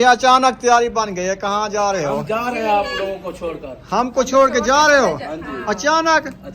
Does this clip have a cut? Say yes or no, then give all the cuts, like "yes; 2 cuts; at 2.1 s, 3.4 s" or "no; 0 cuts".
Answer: no; 0 cuts